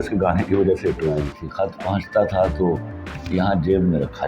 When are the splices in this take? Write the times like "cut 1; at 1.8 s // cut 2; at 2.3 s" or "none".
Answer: cut 1; at 1.4 s